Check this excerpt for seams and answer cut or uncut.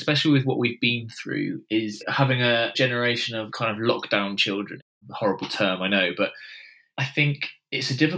cut